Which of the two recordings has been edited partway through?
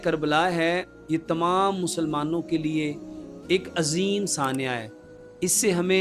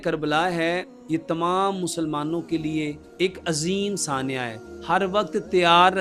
second; 2 cuts; at 3.0 s, 4.7 s

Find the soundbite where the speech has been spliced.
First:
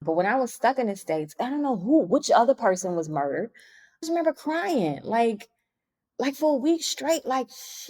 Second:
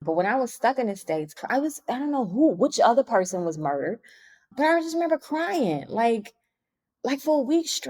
first; 2 cuts; at 1.3 s, 4.0 s

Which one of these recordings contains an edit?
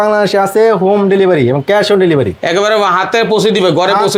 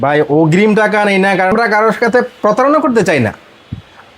second; 1 cut; at 1.5 s

